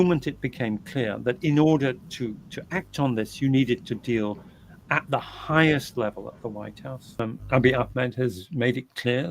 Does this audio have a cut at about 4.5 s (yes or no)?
no